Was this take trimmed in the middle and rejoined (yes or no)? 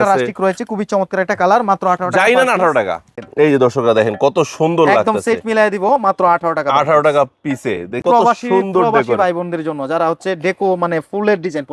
yes